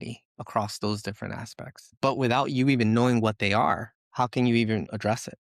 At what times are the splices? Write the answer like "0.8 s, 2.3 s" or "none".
none